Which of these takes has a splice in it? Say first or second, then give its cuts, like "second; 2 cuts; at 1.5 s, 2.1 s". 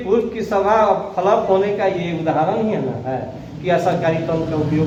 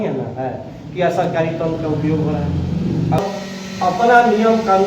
second; 1 cut; at 3.2 s